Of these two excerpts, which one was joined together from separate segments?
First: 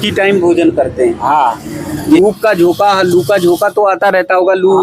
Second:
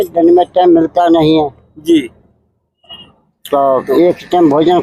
first; 1 cut; at 2.1 s

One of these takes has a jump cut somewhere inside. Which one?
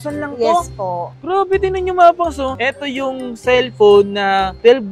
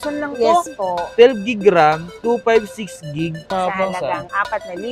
second; 2 cuts; at 1.1 s, 3.5 s

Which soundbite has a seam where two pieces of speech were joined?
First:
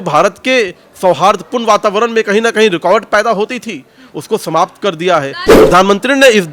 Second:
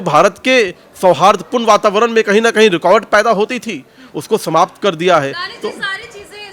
first; 1 cut; at 5.5 s

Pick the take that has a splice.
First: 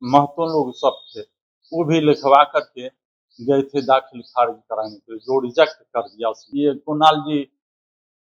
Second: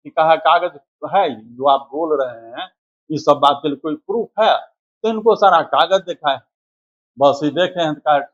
first; 1 cut; at 6.4 s

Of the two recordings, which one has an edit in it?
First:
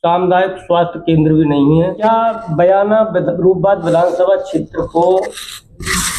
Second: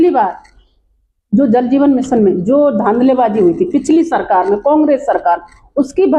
first; 1 cut; at 2.0 s

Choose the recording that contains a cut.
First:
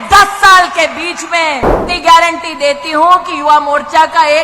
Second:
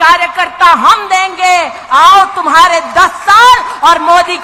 first; 1 cut; at 1.7 s

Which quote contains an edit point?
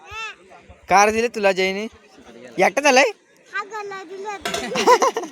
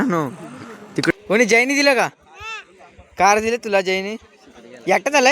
second; 1 cut; at 1.1 s

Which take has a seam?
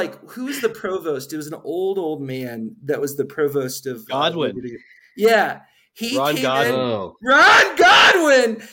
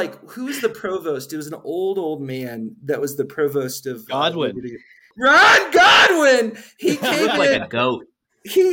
second; 1 cut; at 5.1 s

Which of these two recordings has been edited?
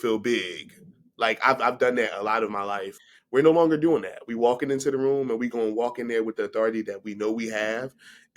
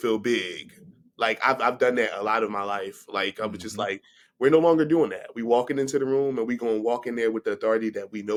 first; 1 cut; at 3.0 s

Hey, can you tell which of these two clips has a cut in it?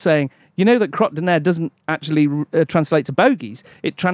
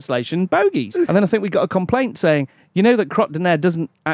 second; 1 cut; at 1.1 s

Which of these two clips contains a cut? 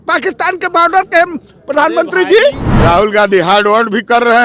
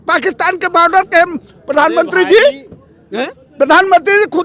first; 1 cut; at 2.7 s

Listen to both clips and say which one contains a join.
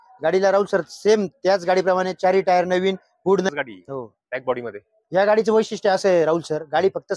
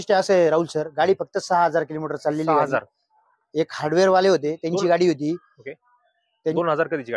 first; 1 cut; at 3.5 s

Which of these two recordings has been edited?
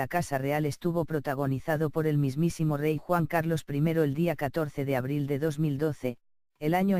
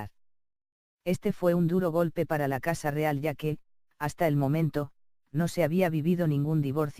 second; 1 cut; at 4.5 s

